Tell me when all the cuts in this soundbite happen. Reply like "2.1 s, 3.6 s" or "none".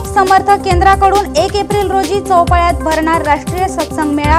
none